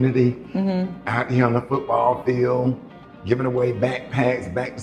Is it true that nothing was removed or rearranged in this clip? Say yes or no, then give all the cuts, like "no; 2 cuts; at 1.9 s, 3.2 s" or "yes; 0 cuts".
yes; 0 cuts